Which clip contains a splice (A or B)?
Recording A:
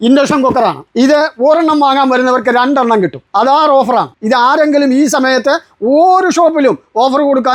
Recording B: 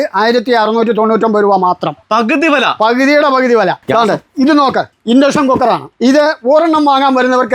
B